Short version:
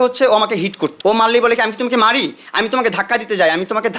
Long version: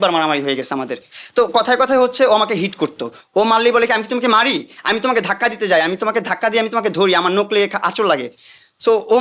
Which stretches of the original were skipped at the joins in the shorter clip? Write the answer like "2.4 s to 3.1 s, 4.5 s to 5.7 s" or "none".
2.9 s to 3.2 s